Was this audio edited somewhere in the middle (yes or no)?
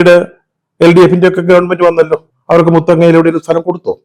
no